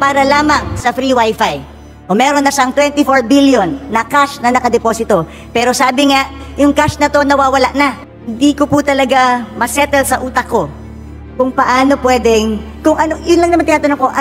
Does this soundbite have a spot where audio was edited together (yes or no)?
yes